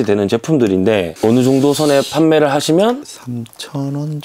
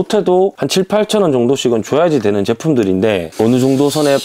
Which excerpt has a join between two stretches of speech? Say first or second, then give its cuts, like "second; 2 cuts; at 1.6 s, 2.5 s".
first; 1 cut; at 3.0 s